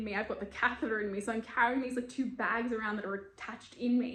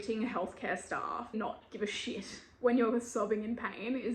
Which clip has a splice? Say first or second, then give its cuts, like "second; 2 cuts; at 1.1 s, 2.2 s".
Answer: second; 1 cut; at 1.4 s